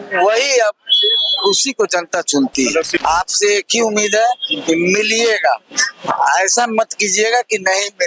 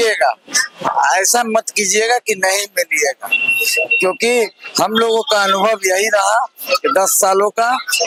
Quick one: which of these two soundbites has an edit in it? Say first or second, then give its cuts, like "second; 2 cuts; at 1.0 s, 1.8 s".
first; 1 cut; at 2.9 s